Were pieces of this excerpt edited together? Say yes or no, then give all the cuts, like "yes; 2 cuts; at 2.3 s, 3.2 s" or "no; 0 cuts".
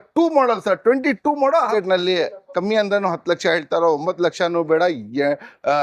yes; 1 cut; at 1.7 s